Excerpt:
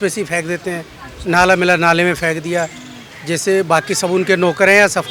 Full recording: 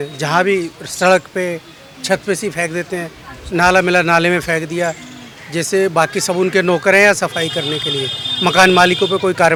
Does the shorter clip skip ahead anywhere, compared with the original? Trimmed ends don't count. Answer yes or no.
no